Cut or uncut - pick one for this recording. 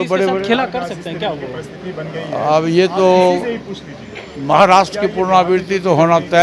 uncut